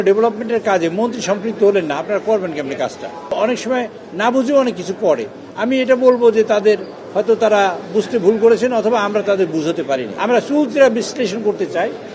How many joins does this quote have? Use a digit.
2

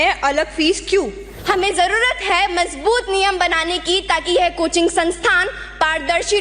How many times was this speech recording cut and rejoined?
1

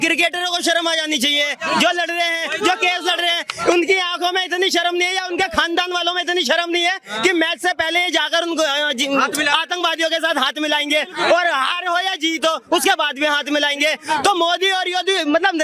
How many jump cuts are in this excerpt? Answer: 0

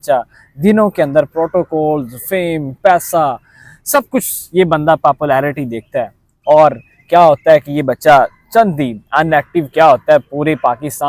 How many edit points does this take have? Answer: 0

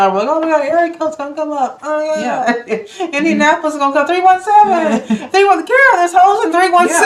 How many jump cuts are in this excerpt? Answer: 0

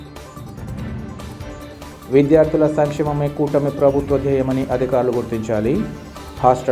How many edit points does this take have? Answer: 1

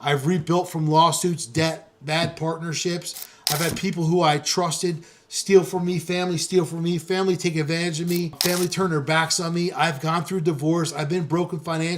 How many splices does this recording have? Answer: 1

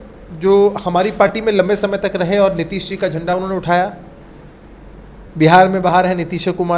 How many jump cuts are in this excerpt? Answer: 0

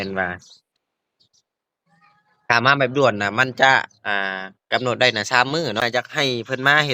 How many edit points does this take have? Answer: 1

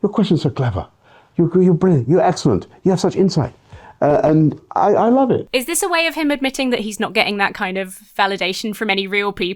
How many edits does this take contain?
1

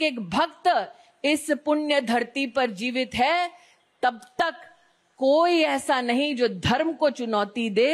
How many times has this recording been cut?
0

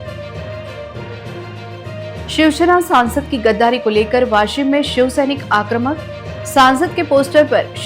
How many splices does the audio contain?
1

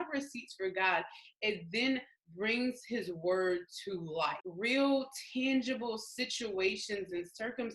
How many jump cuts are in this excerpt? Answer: 1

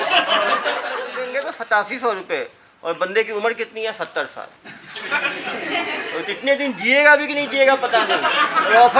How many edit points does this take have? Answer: 1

